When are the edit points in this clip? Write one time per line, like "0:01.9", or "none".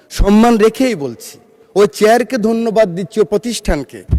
none